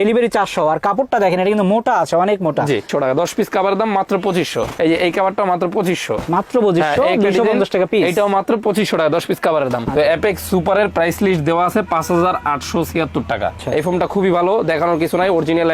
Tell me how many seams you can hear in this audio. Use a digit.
3